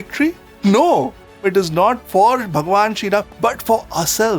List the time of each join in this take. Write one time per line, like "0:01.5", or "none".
0:01.3
0:03.3